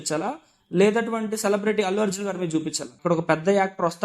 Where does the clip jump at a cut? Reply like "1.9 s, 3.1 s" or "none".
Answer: 2.9 s